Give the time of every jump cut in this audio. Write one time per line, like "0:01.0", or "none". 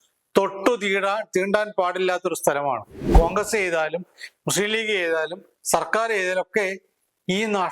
0:03.1

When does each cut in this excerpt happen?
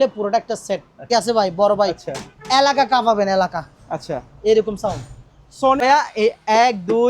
0:01.1
0:05.8

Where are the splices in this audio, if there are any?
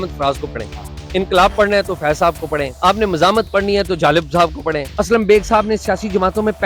0:01.0
0:02.7
0:04.9

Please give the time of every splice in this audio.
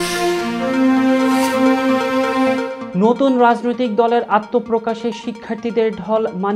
0:02.8

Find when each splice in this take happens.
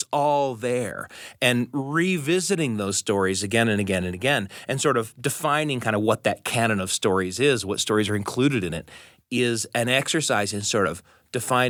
none

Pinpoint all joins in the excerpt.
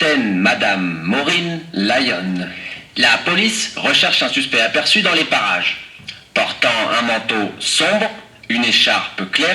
0:08.3

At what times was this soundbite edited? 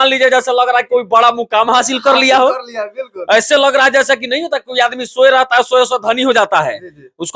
none

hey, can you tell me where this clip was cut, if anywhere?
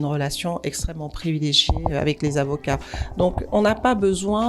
0:01.9
0:03.5

